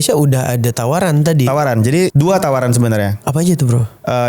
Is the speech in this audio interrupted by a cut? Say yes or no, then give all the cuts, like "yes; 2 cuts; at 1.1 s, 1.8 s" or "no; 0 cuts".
yes; 1 cut; at 2.1 s